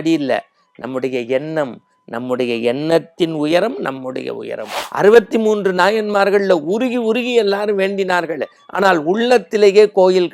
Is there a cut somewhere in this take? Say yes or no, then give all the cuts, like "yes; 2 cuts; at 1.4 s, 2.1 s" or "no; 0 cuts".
yes; 1 cut; at 4.8 s